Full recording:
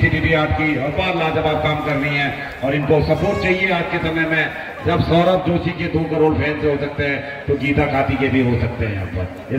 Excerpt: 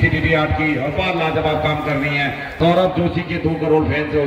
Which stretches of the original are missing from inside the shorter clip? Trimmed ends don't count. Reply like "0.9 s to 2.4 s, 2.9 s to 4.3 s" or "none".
2.6 s to 5.0 s